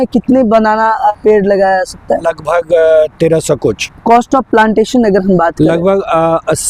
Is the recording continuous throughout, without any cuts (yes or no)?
no